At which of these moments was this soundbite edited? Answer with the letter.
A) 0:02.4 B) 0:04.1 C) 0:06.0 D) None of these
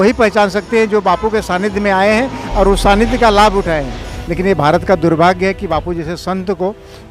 B